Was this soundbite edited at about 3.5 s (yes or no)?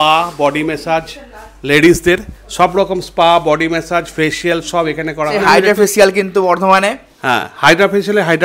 no